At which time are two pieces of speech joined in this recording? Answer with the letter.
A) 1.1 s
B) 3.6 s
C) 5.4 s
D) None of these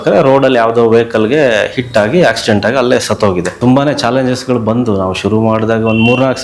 B